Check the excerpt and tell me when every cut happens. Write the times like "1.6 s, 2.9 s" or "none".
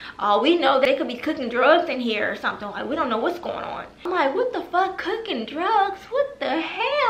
0.8 s, 4.1 s